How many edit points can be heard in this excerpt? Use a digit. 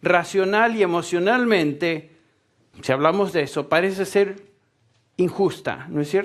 1